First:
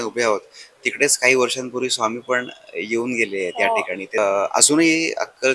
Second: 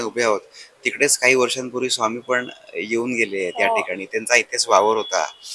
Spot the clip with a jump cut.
first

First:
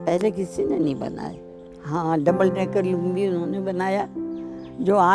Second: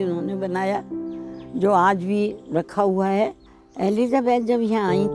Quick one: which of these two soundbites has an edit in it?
second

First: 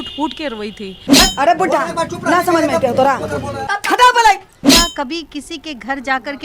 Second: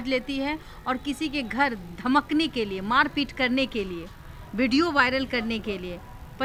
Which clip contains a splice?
first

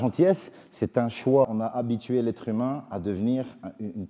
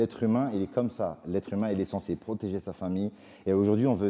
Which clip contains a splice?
first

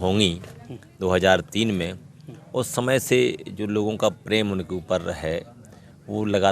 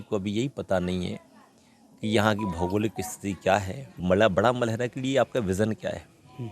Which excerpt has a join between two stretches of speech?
second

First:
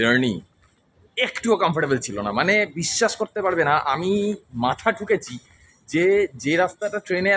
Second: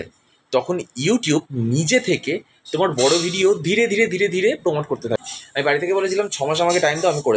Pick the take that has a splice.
second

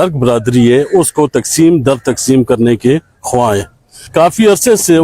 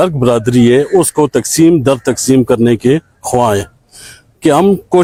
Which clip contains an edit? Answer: first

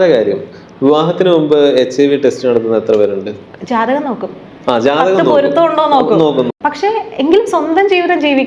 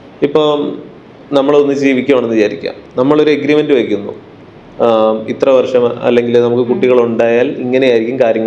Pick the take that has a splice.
first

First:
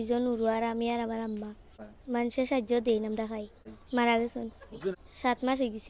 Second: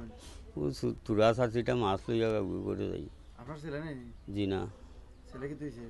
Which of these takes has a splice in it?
first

